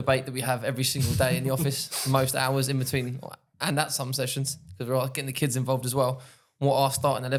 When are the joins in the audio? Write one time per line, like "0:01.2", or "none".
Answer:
none

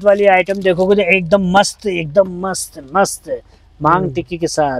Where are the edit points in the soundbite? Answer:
none

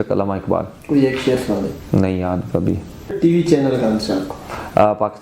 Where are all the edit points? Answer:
0:03.2

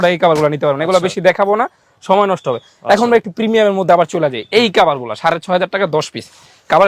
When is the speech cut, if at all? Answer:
none

